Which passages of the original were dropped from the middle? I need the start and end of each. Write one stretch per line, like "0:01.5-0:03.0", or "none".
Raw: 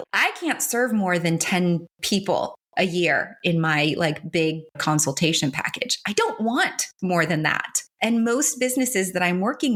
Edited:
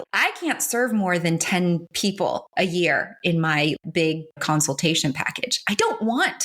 0:02.2-0:02.4
0:04.0-0:04.2